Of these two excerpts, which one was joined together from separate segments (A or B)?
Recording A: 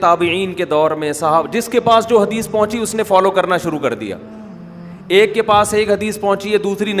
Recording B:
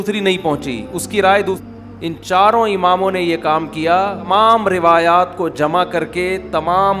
B